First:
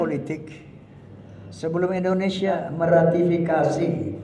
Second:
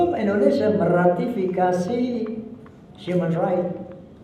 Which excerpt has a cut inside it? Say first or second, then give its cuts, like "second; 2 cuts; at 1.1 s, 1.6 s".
first; 1 cut; at 2.6 s